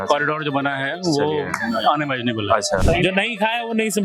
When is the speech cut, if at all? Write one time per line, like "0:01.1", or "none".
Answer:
0:02.8